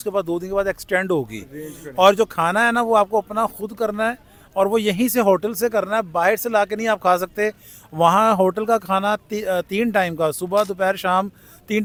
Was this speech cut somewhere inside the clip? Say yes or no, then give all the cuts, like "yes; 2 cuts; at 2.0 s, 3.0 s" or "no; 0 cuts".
no; 0 cuts